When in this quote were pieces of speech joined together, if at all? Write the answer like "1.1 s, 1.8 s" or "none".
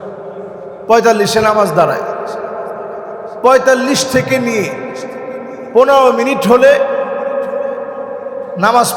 none